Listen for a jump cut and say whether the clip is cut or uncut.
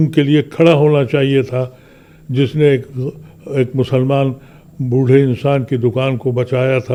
uncut